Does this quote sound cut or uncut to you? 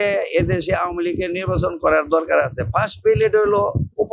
uncut